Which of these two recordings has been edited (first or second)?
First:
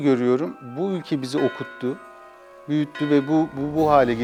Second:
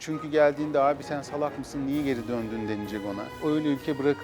second